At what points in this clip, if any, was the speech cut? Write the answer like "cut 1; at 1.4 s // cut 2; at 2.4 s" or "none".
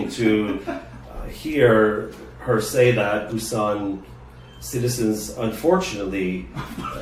none